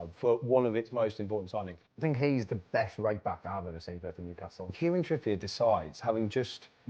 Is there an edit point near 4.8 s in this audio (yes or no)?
yes